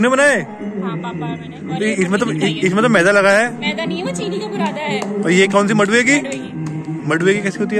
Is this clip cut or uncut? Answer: uncut